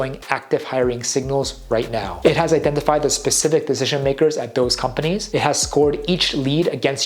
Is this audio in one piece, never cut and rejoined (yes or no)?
yes